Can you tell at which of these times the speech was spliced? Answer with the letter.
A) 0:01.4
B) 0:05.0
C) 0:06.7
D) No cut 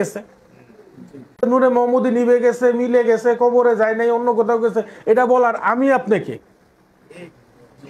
A